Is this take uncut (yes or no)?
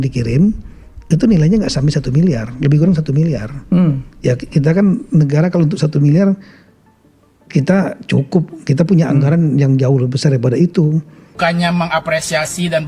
no